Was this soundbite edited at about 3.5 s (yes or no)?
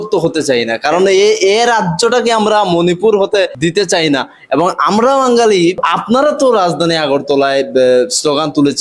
yes